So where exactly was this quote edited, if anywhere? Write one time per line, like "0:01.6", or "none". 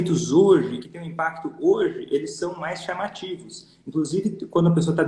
none